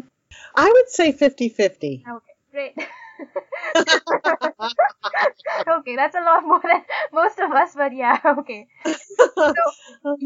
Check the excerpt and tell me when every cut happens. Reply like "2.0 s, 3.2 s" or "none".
none